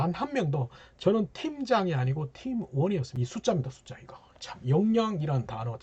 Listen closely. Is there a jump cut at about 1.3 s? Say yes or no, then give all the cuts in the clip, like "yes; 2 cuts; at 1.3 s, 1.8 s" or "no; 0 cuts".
no; 1 cut; at 3.1 s